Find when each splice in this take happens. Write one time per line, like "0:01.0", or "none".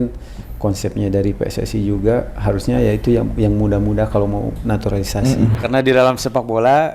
0:05.6